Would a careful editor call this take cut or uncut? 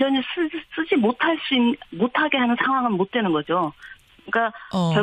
cut